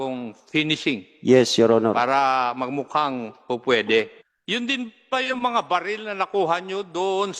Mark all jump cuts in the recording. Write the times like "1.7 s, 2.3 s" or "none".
4.2 s

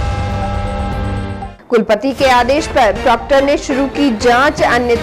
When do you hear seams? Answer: 1.0 s

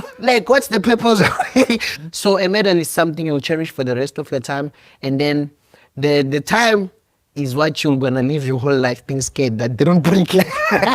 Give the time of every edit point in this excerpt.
1.9 s

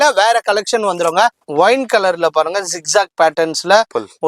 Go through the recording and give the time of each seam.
1.4 s

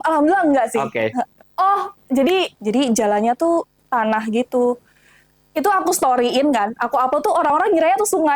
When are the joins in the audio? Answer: 2.6 s

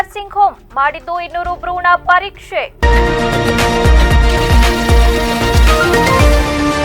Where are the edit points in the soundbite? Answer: 2.7 s

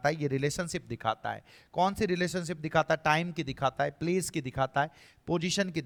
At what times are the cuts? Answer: none

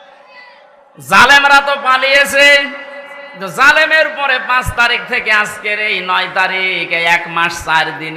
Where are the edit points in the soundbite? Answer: none

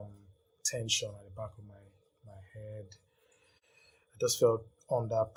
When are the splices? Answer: none

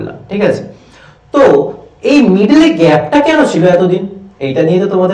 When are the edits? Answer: none

